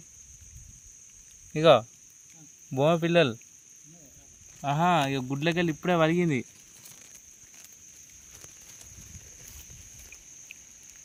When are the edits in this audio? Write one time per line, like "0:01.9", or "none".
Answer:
none